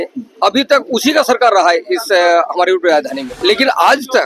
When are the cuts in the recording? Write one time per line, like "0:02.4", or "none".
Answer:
0:03.3